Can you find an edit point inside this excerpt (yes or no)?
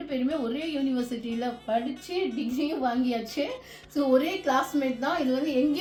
no